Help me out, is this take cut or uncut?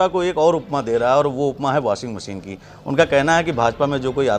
uncut